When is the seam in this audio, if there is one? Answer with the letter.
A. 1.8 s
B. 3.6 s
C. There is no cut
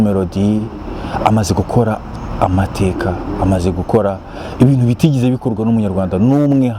C